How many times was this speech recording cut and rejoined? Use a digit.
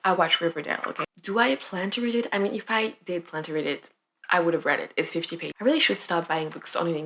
2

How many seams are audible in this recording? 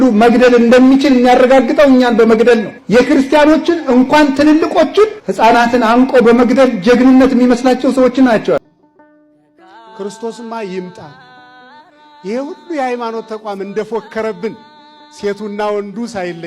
1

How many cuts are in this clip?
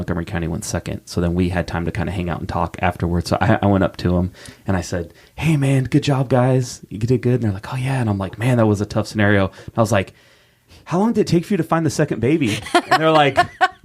1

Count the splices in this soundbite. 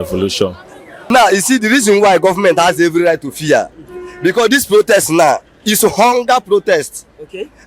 1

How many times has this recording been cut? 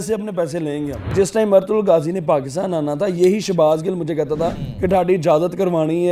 2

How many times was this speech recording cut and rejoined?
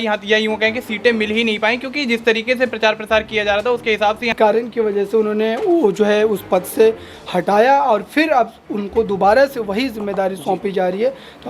1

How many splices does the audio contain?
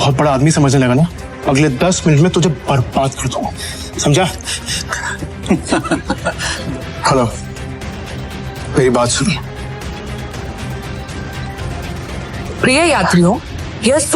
3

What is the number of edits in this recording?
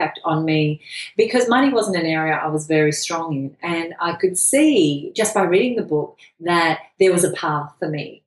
1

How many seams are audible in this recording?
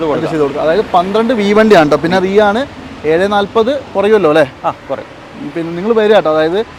0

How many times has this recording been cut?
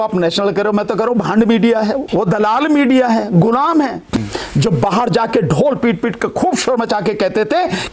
2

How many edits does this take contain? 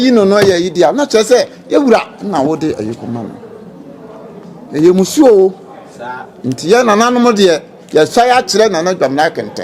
0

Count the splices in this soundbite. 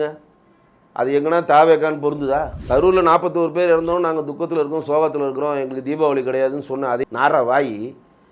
2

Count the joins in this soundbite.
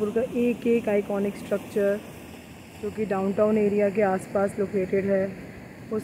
0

